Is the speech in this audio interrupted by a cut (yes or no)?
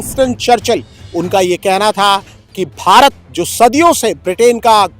yes